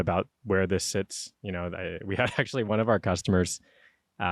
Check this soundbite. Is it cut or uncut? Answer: uncut